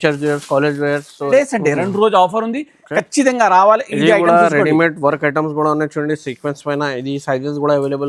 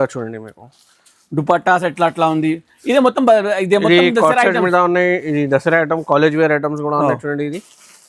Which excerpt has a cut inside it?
first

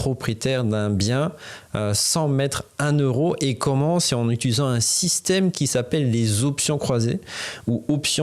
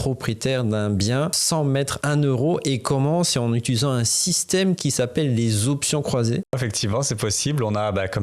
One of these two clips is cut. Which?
second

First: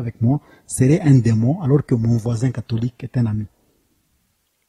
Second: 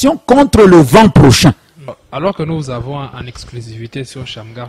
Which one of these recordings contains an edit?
second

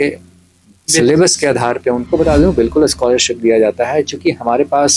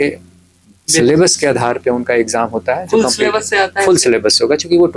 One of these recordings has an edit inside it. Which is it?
first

